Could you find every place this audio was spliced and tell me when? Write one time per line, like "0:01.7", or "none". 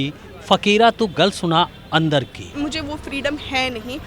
0:02.5